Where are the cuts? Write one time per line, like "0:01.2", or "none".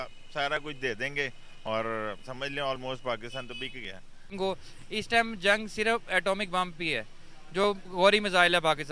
0:04.3